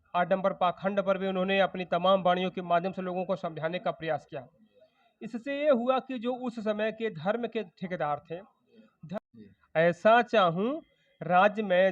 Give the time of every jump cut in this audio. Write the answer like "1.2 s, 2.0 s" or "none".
8.9 s